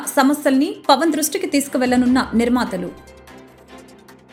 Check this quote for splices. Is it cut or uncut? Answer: uncut